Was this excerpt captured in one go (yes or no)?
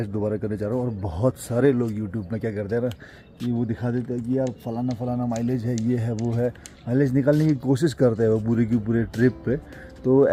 yes